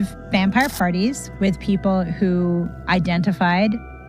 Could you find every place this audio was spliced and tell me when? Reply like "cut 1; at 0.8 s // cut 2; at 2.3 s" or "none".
none